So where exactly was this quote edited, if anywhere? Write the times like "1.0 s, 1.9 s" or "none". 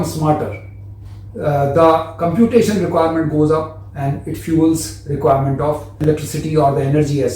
6.0 s

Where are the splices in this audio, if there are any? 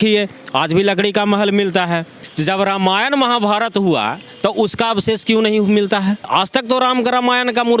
2.2 s, 6.2 s

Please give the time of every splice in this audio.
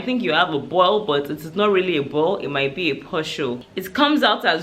3.7 s

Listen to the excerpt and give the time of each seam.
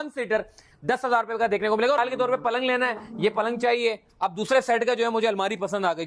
2.0 s

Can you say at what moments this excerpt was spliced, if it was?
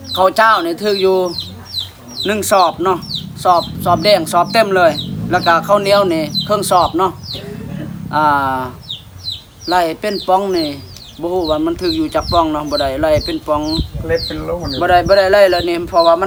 none

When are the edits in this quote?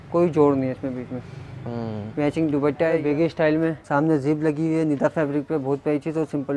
3.0 s, 3.8 s

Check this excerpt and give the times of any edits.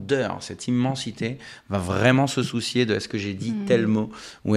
none

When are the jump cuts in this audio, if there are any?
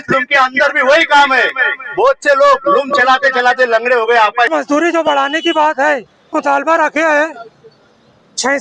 4.5 s, 6.3 s

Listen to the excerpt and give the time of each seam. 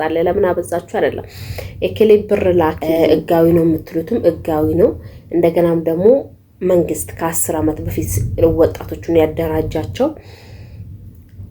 2.8 s

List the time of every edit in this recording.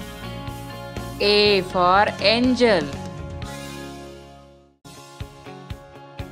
none

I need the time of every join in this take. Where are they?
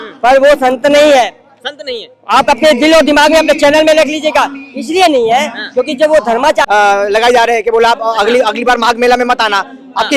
6.7 s

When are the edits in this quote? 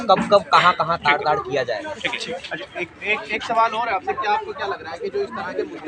none

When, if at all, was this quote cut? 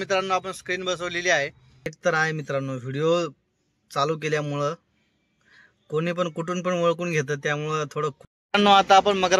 1.9 s, 8.3 s

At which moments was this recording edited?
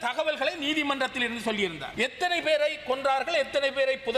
1.8 s

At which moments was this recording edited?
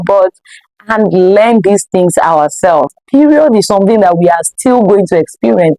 2.9 s

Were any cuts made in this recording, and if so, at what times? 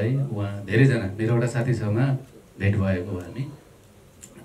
none

